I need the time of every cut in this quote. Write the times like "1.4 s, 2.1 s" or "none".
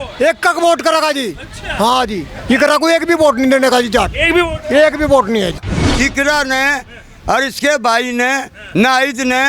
5.7 s